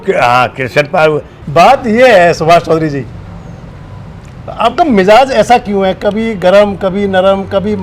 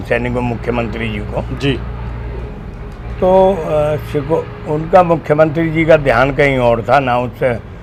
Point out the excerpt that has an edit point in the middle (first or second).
first